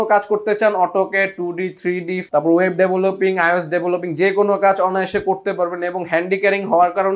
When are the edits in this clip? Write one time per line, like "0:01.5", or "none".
none